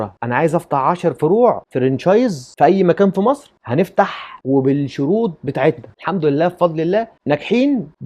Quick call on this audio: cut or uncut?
uncut